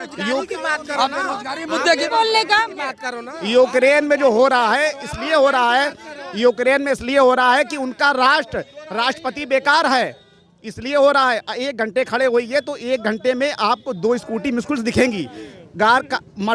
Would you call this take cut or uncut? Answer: uncut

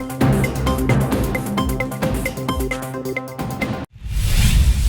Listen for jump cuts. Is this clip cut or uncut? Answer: cut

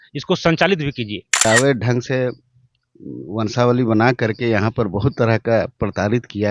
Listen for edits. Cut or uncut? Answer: cut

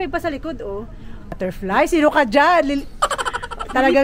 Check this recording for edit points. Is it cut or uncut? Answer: cut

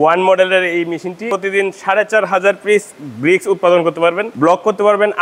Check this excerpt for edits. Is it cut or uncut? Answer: cut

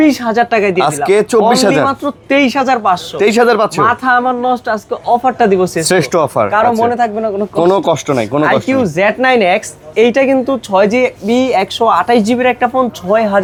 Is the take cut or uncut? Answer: uncut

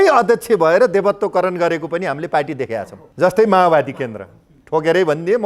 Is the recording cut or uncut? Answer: cut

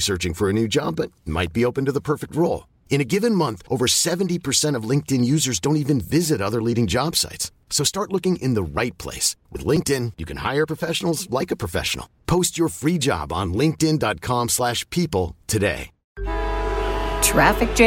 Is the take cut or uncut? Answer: cut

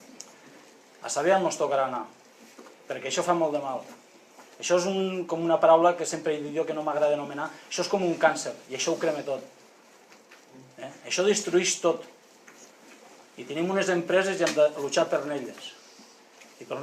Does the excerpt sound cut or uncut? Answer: cut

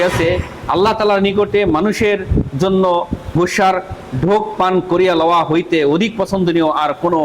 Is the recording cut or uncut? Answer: uncut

